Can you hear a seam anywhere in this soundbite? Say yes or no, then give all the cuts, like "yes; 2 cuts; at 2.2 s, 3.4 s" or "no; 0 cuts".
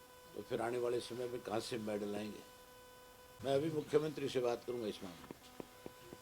yes; 1 cut; at 3.5 s